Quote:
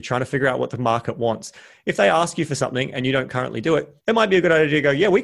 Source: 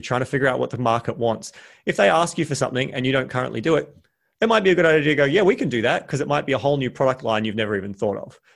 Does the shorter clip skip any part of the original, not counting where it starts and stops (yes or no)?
yes